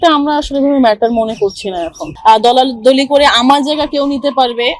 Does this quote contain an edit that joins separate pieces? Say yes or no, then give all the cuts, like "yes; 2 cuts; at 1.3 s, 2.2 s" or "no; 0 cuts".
yes; 1 cut; at 2.1 s